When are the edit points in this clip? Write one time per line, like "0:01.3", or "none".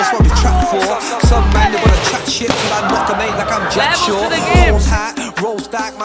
none